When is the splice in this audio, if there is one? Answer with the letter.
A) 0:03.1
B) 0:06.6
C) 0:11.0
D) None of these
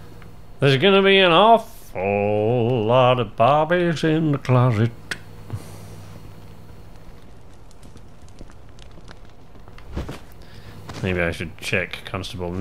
C